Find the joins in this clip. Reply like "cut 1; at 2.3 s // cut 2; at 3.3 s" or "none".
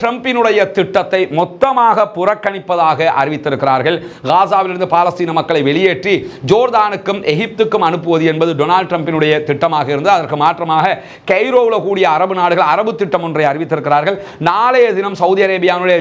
none